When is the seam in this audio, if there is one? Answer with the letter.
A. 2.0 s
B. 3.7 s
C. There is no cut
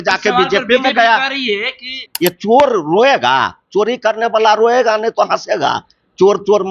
A